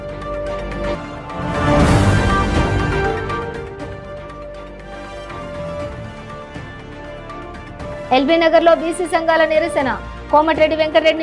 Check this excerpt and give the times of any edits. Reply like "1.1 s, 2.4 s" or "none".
0.9 s